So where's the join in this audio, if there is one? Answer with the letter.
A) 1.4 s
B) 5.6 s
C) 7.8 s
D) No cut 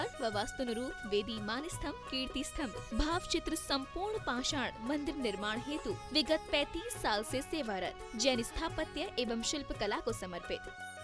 D